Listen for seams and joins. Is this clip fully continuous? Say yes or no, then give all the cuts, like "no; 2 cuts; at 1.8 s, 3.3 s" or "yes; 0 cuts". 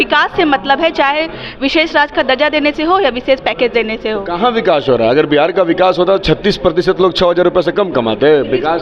yes; 0 cuts